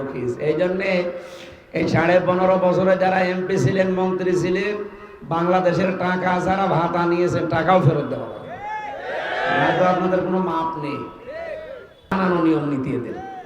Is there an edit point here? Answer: yes; 1 cut; at 12.2 s

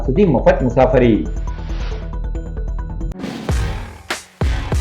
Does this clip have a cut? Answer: yes; 1 cut; at 3.1 s

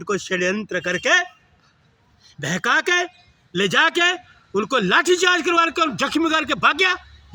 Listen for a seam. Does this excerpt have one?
no; 0 cuts

